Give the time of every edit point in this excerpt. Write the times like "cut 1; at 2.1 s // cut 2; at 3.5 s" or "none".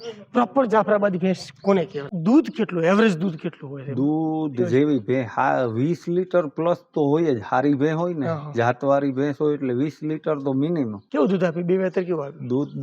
cut 1; at 2.0 s // cut 2; at 11.0 s